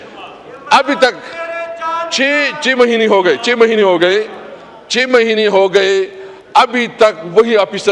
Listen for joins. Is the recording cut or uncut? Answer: uncut